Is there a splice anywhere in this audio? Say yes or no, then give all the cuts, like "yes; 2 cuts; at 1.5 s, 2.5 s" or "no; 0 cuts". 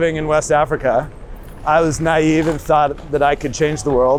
no; 0 cuts